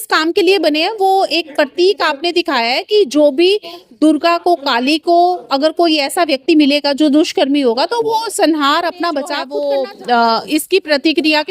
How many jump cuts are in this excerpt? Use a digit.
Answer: 1